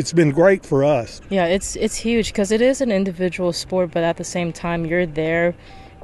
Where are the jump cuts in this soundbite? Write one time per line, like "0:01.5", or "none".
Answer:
0:01.2